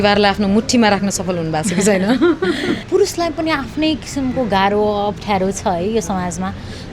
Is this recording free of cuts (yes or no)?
no